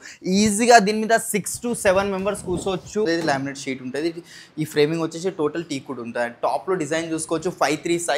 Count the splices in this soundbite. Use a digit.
1